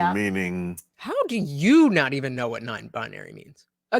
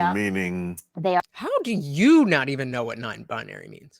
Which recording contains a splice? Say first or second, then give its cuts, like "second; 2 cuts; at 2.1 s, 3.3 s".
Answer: first; 1 cut; at 0.9 s